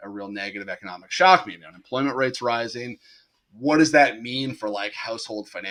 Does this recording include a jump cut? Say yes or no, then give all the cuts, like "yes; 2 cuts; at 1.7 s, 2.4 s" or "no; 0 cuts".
no; 0 cuts